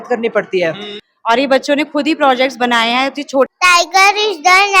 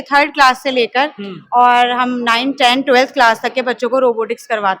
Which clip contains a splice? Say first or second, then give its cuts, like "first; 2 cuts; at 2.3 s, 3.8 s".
first; 2 cuts; at 0.9 s, 3.5 s